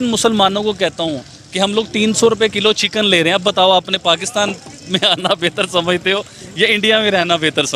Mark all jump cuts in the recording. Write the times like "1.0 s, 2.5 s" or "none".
none